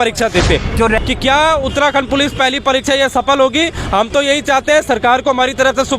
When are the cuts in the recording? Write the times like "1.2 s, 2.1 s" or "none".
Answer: 1.0 s